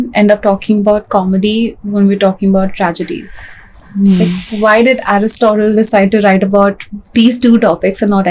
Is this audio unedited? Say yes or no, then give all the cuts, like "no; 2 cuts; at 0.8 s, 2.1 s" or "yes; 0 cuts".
yes; 0 cuts